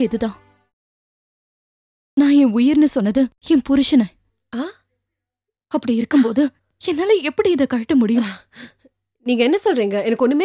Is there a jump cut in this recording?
no; 0 cuts

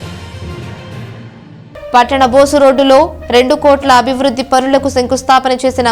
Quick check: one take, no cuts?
no; 1 cut; at 1.1 s

